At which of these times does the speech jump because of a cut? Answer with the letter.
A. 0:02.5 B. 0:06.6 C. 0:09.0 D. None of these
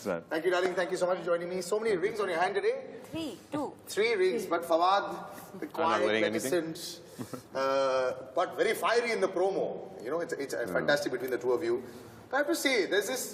D